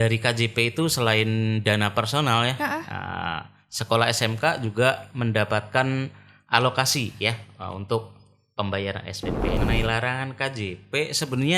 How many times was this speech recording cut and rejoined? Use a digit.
1